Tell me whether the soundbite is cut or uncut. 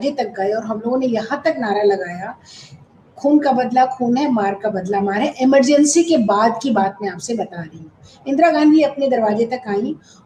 uncut